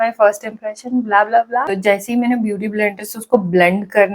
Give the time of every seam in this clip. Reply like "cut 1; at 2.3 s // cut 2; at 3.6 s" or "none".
cut 1; at 1.7 s